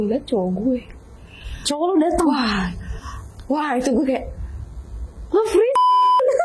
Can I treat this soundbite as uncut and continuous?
yes; 0 cuts

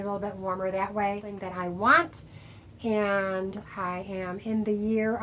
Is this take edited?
yes; 1 cut; at 1.4 s

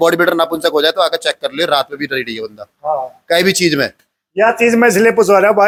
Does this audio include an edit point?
no; 0 cuts

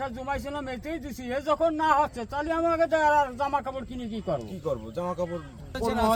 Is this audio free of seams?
yes; 0 cuts

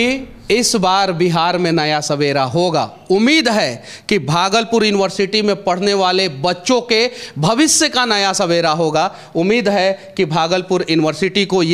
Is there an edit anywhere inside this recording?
no; 0 cuts

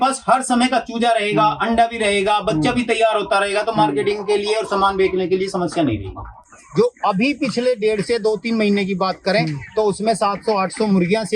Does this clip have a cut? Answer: yes; 1 cut; at 6.5 s

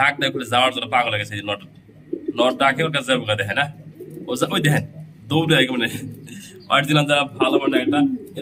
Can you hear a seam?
no; 0 cuts

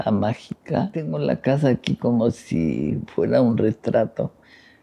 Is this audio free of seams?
no; 1 cut; at 1.1 s

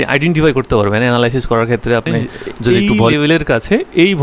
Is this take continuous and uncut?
no; 1 cut; at 2.7 s

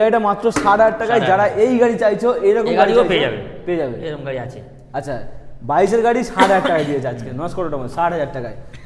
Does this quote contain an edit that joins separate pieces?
no; 0 cuts

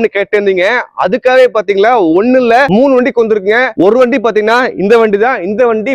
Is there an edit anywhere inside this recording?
no; 0 cuts

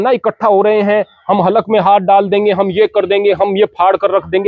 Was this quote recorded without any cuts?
yes; 0 cuts

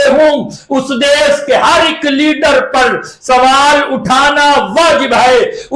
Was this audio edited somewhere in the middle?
no; 0 cuts

